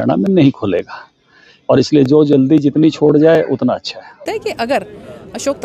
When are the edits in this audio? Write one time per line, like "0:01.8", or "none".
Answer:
0:04.2